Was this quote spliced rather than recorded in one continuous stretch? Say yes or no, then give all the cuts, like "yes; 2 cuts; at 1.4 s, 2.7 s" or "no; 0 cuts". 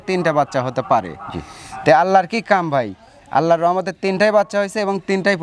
no; 0 cuts